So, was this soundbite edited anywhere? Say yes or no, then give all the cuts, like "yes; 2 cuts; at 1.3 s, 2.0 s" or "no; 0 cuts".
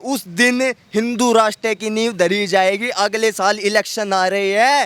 no; 0 cuts